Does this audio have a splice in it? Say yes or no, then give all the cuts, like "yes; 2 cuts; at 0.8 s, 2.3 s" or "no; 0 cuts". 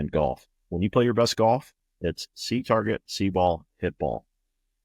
yes; 1 cut; at 1.8 s